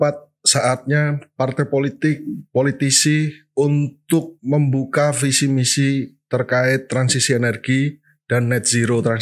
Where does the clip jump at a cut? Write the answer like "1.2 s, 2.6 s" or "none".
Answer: none